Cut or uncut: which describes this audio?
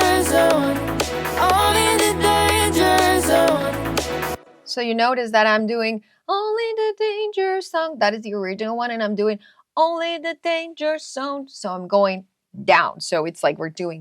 cut